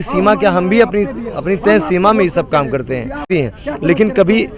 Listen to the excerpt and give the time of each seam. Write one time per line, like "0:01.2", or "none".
0:03.3